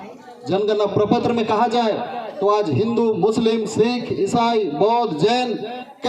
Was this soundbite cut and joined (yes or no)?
no